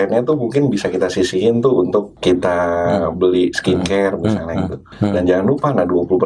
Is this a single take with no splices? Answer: no; 2 cuts; at 2.1 s, 4.9 s

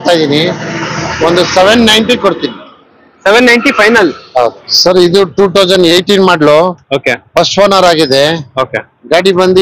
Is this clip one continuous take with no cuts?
no; 1 cut; at 4.7 s

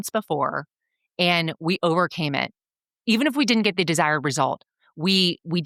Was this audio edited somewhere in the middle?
no; 0 cuts

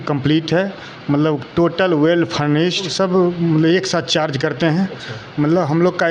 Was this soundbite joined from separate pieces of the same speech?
yes; 1 cut; at 2.9 s

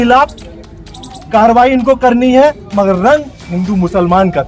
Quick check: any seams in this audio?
no; 0 cuts

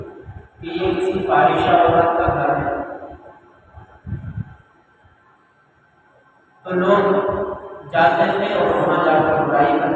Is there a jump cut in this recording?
no; 0 cuts

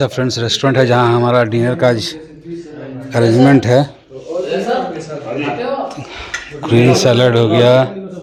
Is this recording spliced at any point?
no; 0 cuts

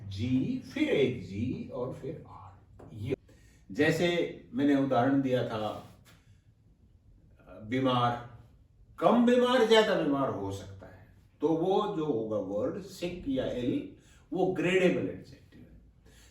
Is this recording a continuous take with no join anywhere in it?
no; 1 cut; at 3.1 s

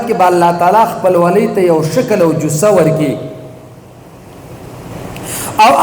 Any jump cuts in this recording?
yes; 1 cut; at 4.9 s

